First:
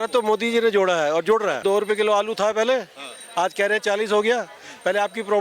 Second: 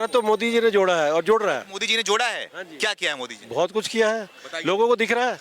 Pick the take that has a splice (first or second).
first